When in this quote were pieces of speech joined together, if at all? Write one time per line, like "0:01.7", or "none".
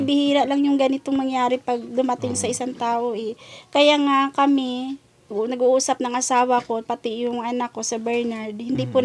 none